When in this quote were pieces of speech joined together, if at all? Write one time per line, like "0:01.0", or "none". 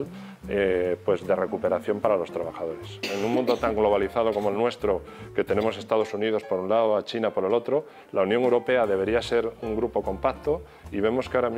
0:03.0